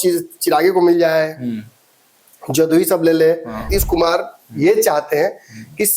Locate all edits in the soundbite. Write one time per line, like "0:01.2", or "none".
0:03.7

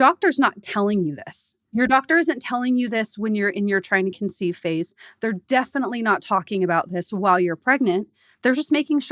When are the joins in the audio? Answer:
0:01.5

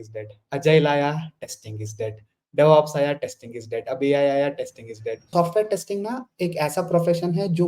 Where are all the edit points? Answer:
0:05.3

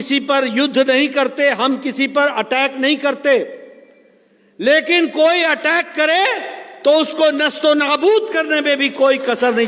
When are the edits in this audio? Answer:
none

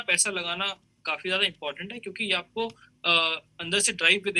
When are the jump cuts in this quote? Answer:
none

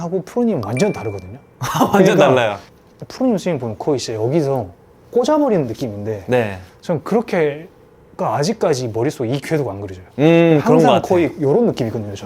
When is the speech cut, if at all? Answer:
0:02.7

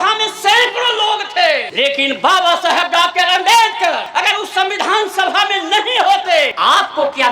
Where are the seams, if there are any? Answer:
0:01.7
0:04.0
0:06.5

